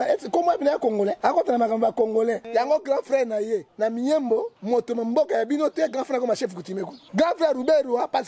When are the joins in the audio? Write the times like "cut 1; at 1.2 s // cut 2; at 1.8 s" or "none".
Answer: cut 1; at 1.2 s // cut 2; at 2.4 s // cut 3; at 3.7 s // cut 4; at 4.5 s // cut 5; at 7.0 s